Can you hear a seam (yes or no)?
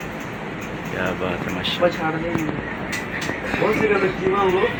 no